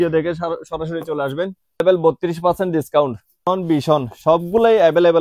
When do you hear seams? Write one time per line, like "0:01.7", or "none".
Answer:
0:01.8
0:03.4